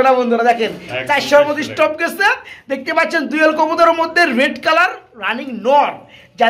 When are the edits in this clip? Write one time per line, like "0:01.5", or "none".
none

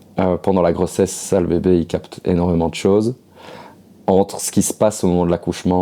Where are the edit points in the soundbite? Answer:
none

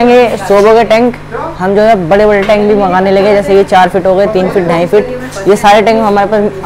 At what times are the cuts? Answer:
none

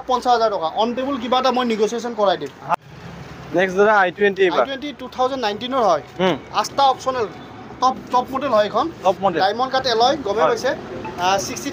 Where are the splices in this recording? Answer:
0:02.7

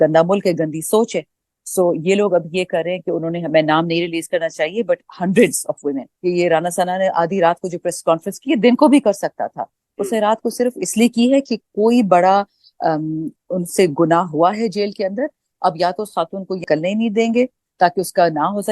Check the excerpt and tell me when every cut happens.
0:06.1
0:16.6

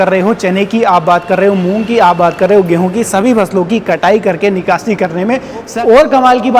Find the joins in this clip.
0:05.7

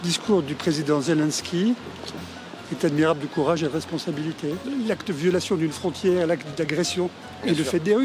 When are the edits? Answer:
0:04.7

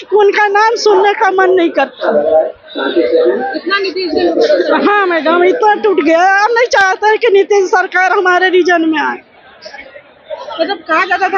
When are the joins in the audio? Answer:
none

